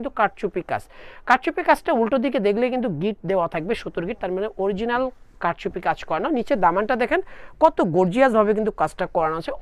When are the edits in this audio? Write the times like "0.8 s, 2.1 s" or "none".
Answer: none